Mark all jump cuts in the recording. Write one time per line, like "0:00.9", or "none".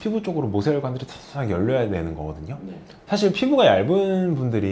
0:03.0